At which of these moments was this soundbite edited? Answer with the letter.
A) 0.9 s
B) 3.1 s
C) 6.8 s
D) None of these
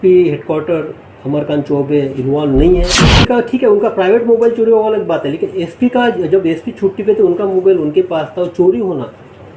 B